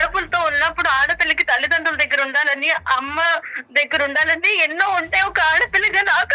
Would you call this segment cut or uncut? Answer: uncut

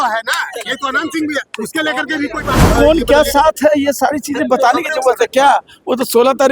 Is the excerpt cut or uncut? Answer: cut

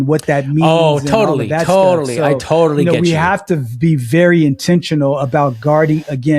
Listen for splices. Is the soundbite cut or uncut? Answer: uncut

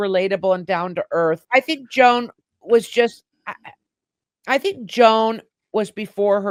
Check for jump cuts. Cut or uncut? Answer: uncut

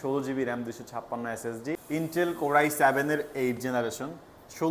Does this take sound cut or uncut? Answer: cut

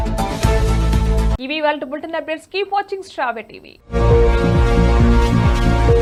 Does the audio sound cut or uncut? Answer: uncut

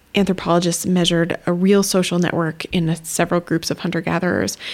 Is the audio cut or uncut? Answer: cut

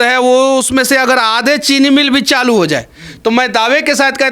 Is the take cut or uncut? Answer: uncut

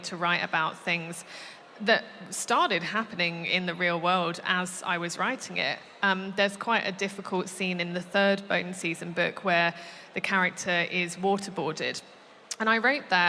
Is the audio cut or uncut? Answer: uncut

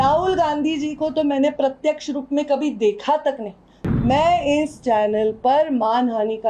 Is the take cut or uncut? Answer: cut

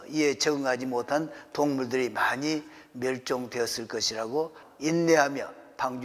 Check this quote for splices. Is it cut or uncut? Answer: cut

